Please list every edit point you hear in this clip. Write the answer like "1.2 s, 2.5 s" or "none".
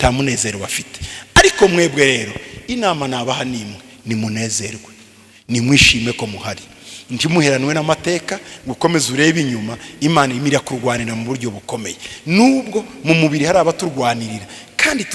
none